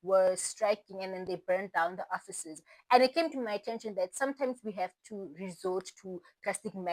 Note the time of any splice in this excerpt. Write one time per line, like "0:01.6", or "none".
none